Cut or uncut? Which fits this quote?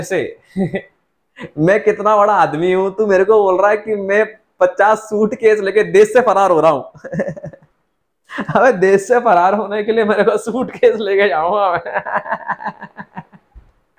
uncut